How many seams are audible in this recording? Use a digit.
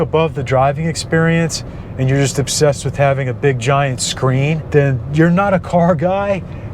1